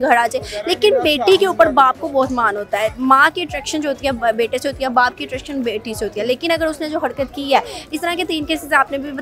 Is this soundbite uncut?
yes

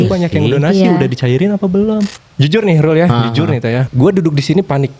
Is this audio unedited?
no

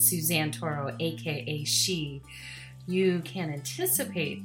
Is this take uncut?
yes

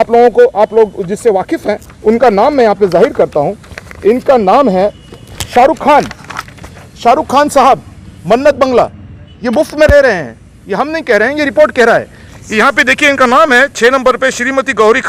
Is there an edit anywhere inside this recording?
no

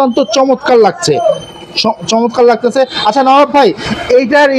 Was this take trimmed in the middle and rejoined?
no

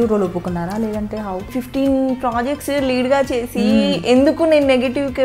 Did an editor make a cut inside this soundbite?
yes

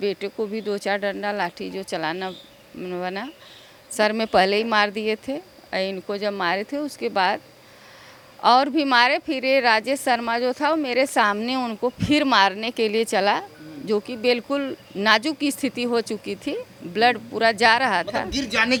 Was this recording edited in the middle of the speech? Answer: no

